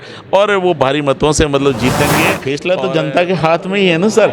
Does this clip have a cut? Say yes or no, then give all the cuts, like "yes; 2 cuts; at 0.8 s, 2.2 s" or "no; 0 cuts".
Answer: yes; 1 cut; at 2.6 s